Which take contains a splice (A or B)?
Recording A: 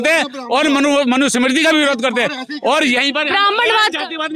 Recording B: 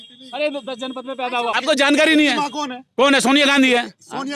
B